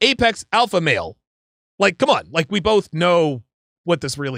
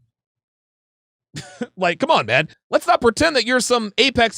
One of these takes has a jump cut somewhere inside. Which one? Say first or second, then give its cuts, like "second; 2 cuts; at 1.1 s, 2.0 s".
second; 1 cut; at 2.5 s